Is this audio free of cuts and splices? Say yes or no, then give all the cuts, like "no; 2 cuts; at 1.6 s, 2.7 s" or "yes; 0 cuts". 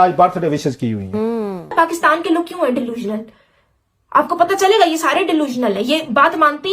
no; 1 cut; at 1.6 s